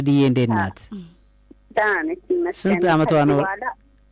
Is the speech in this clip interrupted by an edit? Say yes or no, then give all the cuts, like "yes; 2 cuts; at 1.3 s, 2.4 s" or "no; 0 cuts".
no; 0 cuts